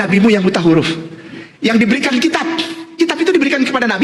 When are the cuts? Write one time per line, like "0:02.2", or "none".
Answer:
none